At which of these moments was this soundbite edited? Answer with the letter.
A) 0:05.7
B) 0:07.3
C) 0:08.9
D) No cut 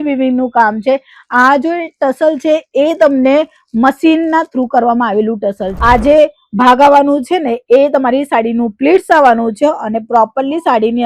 A